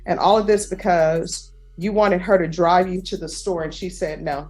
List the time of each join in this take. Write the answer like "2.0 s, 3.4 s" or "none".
none

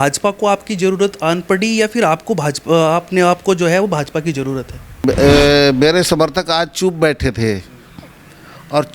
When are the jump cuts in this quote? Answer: 5.0 s

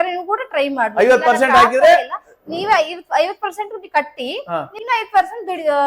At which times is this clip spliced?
4.7 s

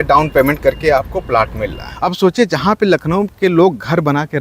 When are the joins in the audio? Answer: 2.0 s

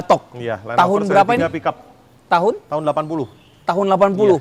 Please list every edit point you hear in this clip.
none

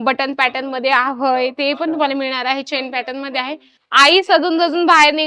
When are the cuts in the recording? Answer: 3.7 s

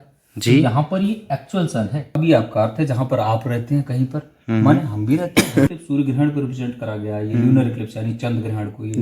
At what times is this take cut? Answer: 2.1 s, 5.7 s

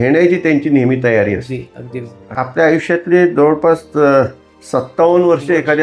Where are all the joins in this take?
2.2 s

